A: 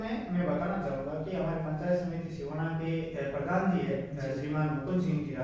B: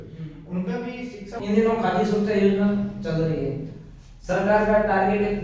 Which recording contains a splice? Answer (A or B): B